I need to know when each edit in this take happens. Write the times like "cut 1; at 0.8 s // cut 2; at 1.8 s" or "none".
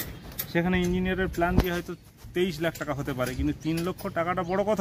none